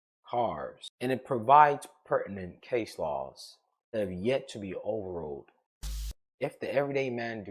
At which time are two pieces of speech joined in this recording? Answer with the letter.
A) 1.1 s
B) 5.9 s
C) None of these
B